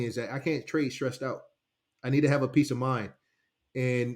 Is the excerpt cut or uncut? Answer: uncut